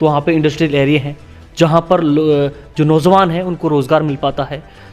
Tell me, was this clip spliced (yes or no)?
no